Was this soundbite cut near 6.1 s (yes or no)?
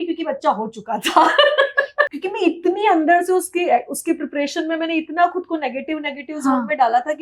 no